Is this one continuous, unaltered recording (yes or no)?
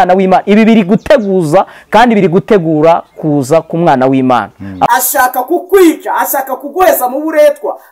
no